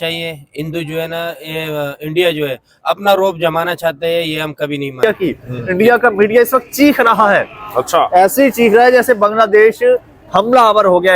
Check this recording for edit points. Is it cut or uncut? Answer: cut